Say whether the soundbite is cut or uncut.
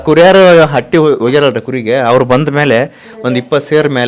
uncut